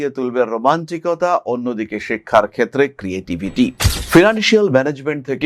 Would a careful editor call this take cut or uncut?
cut